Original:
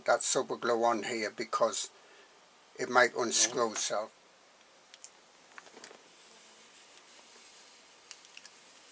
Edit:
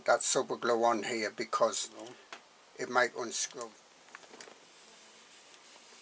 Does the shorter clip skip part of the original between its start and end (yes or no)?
yes